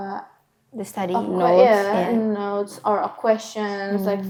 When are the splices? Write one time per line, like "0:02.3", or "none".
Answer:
none